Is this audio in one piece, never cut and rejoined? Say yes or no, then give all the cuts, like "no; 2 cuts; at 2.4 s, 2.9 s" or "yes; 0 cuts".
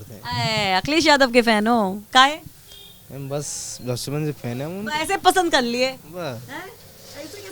yes; 0 cuts